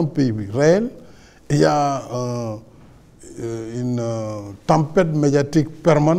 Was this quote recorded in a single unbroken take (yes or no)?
no